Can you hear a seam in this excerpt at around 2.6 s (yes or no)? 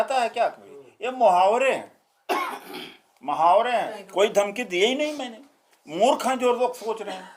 no